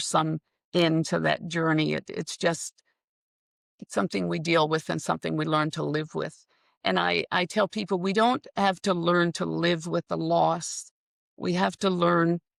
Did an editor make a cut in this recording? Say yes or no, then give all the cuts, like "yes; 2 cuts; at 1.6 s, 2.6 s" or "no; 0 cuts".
no; 0 cuts